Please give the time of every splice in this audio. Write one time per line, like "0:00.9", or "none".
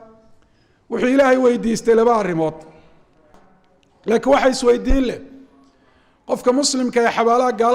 0:03.3